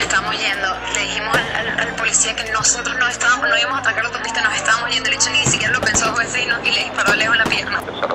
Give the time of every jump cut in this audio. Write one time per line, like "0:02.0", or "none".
none